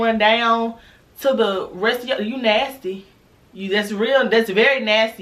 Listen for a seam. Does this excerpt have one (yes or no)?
no